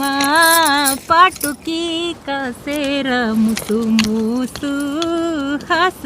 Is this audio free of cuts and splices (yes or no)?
yes